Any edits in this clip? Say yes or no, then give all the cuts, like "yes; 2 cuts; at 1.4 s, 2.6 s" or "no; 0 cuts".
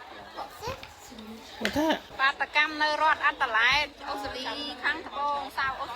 yes; 1 cut; at 2.1 s